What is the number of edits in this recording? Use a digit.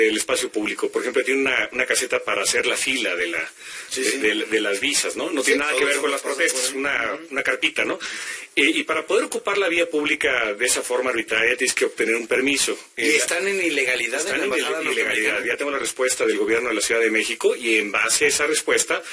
1